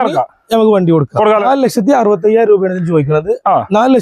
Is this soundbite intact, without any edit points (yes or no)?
no